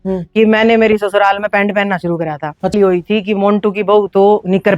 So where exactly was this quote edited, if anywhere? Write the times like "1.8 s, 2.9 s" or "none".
2.7 s